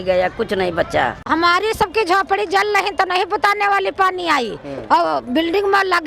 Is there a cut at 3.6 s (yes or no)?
no